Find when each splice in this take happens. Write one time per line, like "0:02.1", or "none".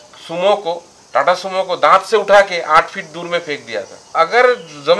0:00.9
0:04.1